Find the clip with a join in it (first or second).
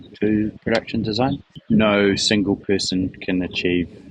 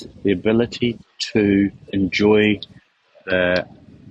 first